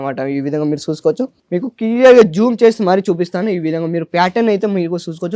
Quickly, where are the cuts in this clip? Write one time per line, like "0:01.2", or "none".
none